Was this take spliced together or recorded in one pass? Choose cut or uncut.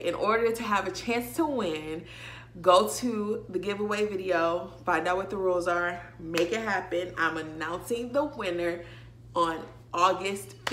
uncut